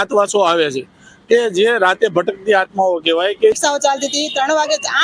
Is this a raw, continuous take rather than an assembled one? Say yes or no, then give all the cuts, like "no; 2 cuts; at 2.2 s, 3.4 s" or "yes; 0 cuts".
no; 1 cut; at 3.6 s